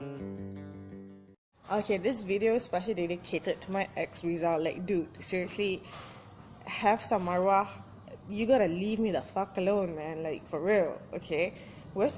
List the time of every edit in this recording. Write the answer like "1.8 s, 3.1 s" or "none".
none